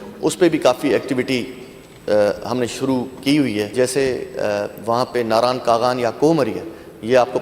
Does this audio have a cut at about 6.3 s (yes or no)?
no